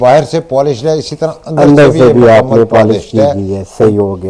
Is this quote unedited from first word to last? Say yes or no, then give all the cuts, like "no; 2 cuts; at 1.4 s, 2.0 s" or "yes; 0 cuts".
yes; 0 cuts